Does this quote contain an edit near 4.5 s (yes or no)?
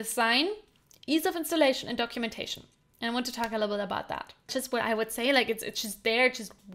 yes